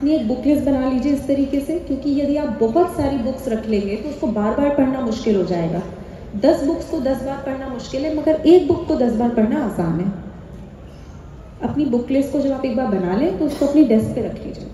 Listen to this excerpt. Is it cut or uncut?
uncut